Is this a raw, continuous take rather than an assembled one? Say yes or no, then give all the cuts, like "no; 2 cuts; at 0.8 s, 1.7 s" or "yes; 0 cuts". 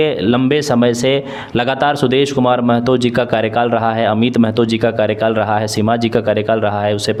yes; 0 cuts